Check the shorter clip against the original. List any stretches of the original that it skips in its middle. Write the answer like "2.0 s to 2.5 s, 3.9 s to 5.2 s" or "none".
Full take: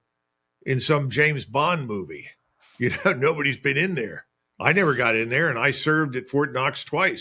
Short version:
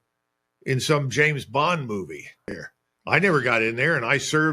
2.7 s to 4.2 s